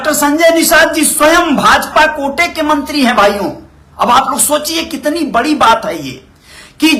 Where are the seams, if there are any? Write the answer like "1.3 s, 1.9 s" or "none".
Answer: none